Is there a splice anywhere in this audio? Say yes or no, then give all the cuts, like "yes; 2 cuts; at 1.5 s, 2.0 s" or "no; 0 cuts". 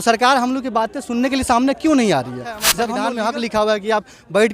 yes; 1 cut; at 2.8 s